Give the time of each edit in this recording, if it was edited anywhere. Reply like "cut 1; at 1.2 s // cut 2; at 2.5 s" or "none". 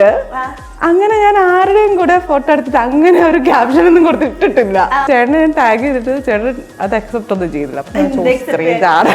cut 1; at 5.0 s